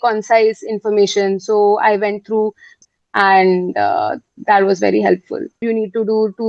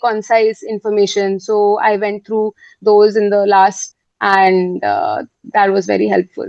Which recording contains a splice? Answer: first; 2 cuts; at 2.7 s, 5.6 s

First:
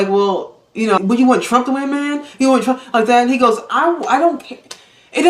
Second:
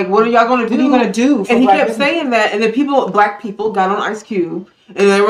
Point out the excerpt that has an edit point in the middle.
first; 1 cut; at 1.0 s

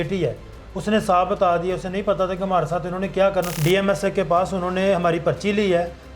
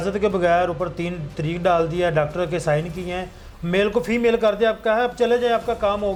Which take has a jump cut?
first; 1 cut; at 3.5 s

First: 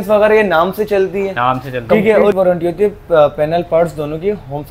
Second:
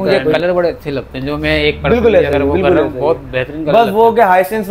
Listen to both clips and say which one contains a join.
first; 1 cut; at 2.3 s

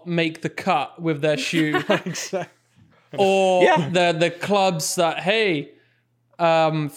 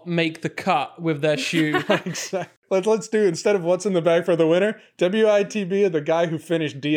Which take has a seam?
second; 1 cut; at 2.7 s

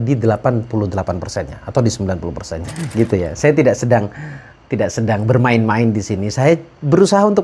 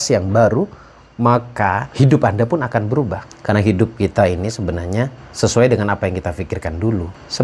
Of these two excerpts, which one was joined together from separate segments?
first; 1 cut; at 2.8 s

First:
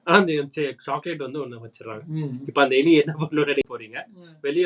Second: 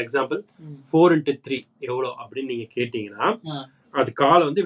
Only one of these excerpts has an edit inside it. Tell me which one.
first; 1 cut; at 3.6 s

